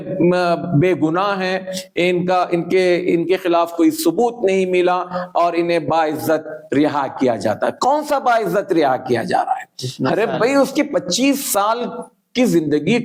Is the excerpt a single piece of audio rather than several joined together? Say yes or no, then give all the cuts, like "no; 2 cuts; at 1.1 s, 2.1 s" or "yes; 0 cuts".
yes; 0 cuts